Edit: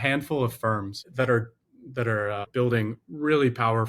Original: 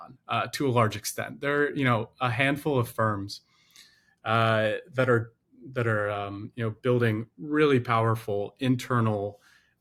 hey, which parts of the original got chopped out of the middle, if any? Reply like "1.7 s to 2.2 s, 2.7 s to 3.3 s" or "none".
3.4 s to 4.9 s, 6.3 s to 6.8 s